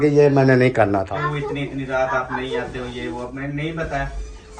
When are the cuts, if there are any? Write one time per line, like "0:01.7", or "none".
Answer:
0:01.1